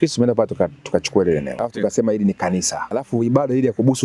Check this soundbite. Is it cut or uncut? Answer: cut